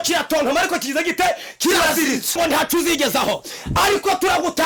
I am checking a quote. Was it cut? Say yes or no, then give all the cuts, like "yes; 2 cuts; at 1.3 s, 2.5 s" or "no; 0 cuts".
yes; 1 cut; at 2.4 s